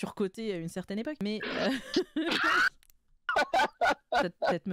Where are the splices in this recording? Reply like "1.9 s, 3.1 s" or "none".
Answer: 1.2 s